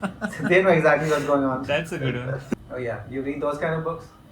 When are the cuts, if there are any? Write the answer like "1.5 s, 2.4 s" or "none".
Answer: 2.5 s